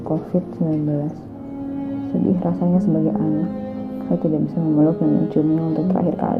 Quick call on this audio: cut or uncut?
uncut